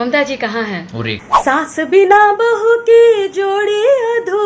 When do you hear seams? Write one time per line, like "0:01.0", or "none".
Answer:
0:01.2